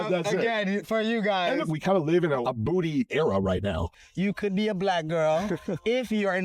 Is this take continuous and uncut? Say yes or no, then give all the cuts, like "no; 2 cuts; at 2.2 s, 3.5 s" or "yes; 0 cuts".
no; 3 cuts; at 1.7 s, 2.4 s, 4.0 s